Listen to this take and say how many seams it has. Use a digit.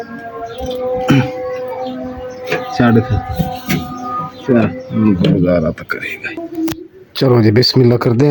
0